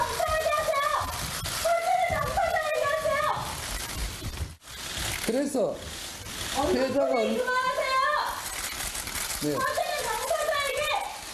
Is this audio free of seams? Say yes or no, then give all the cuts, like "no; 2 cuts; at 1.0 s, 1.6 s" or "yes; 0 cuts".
yes; 0 cuts